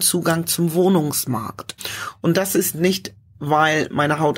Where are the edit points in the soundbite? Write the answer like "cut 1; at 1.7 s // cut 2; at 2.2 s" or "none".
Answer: cut 1; at 1.8 s